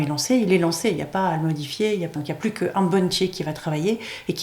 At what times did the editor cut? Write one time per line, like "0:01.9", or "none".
0:02.1

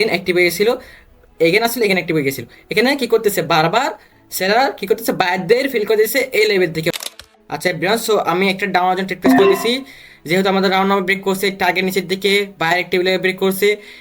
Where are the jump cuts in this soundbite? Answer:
0:06.9

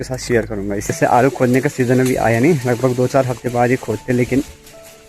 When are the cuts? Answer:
0:00.9

